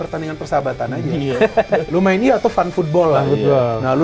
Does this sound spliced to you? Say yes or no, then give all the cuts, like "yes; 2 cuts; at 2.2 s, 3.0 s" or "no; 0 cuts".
no; 0 cuts